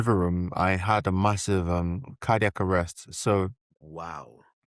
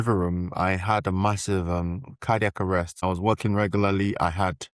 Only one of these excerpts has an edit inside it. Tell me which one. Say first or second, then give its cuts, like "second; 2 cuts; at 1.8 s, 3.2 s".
second; 1 cut; at 3.0 s